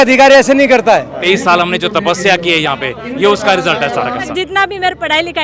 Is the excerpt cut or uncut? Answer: cut